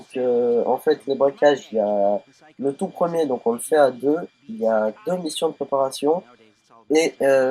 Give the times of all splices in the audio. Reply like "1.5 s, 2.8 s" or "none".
4.8 s